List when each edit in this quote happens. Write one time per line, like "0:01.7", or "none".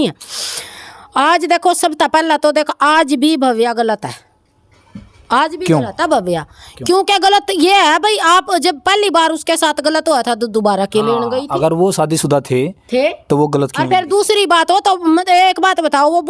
none